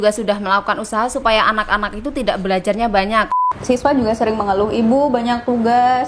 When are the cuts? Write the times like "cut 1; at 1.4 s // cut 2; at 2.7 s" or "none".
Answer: cut 1; at 3.3 s

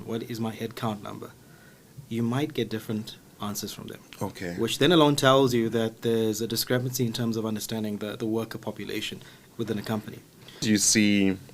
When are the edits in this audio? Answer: cut 1; at 10.6 s

